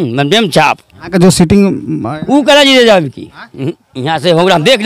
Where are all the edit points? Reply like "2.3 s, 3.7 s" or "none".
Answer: 0.9 s